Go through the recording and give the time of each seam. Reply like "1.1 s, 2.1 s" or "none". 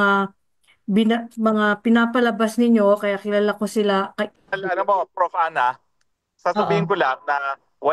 4.3 s